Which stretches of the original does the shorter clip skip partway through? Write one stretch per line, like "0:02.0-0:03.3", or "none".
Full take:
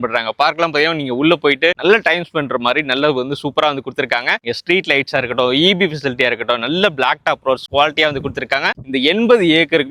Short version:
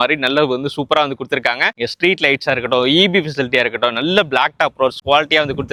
none